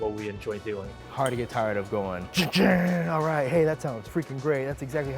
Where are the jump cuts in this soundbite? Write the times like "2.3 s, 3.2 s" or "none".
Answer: 1.0 s, 2.2 s, 4.0 s